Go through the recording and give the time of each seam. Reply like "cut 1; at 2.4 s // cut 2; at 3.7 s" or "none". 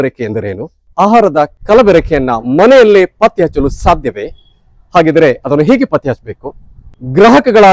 none